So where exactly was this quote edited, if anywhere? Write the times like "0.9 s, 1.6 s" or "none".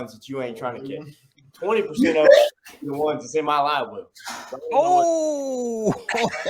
none